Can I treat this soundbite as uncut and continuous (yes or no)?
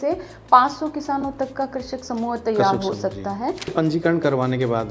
no